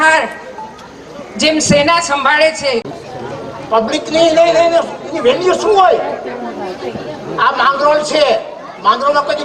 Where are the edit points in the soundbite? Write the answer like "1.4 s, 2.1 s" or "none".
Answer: 2.9 s